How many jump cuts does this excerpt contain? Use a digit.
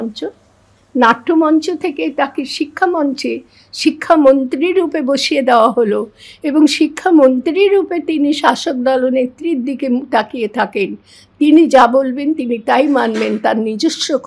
0